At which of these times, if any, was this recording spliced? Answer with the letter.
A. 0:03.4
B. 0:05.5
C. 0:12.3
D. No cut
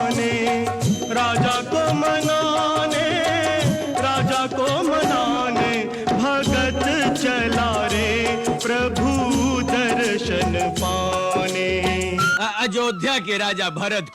C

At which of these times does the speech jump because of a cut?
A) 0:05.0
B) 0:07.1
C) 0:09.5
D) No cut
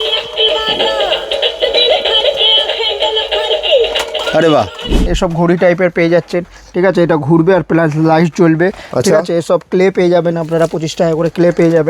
A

